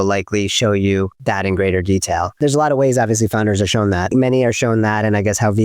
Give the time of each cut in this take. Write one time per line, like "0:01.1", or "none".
0:01.2
0:02.3
0:04.1